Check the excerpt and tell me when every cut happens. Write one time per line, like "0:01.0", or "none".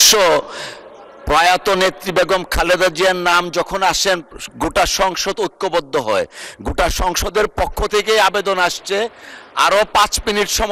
none